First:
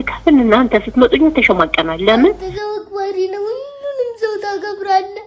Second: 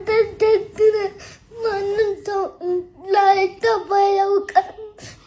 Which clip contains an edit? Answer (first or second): first